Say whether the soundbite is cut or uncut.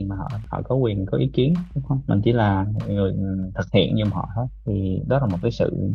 uncut